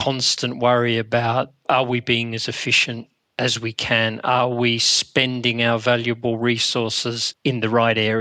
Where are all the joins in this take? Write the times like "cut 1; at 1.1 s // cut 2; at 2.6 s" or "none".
cut 1; at 7.3 s